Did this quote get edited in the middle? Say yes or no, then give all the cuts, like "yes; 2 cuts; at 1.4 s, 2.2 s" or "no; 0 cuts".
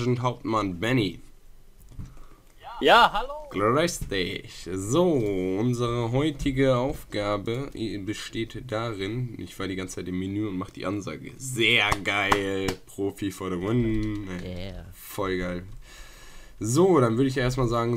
no; 0 cuts